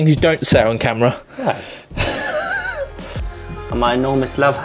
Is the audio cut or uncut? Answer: uncut